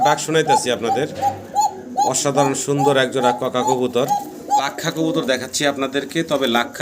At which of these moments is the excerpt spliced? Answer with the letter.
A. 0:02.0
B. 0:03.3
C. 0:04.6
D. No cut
C